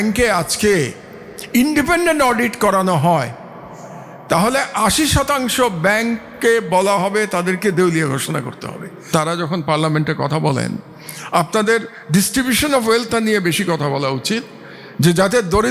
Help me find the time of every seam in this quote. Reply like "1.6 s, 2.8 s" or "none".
9.1 s